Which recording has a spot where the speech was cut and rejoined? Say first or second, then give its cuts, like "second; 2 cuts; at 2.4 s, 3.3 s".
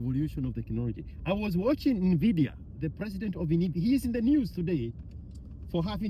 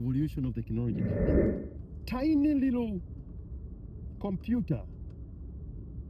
second; 1 cut; at 1.3 s